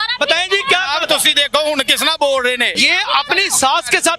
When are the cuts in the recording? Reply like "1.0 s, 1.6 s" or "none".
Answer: 2.8 s